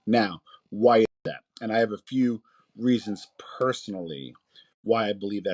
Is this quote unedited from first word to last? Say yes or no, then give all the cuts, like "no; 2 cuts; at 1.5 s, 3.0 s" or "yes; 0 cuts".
yes; 0 cuts